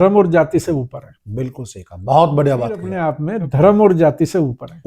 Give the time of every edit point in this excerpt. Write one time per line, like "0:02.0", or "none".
none